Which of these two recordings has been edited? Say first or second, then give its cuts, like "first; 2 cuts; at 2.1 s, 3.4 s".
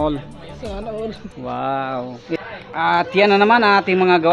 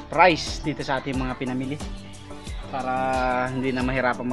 first; 1 cut; at 2.4 s